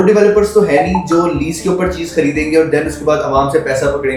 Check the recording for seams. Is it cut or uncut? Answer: uncut